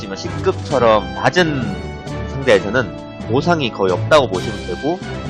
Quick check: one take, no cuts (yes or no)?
no